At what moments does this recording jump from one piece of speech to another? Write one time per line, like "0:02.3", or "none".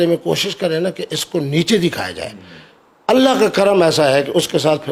none